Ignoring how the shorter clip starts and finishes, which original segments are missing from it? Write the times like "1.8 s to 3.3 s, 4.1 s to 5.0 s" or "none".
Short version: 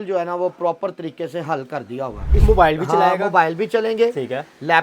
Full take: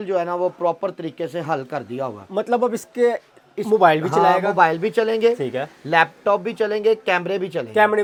2.2 s to 3.4 s